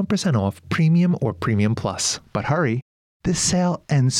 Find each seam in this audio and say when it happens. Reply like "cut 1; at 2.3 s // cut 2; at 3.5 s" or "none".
cut 1; at 2.1 s